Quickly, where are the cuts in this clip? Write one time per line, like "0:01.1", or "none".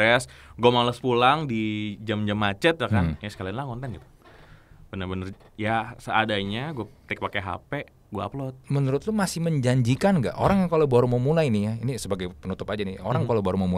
0:08.6